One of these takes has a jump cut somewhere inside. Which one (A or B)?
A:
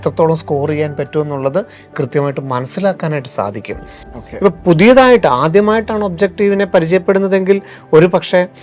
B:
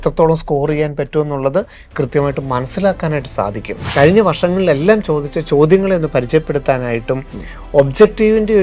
B